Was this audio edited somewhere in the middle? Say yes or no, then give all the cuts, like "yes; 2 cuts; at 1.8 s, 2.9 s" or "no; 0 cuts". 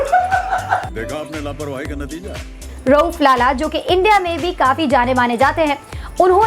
yes; 1 cut; at 2.7 s